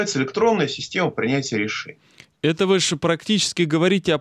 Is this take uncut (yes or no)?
yes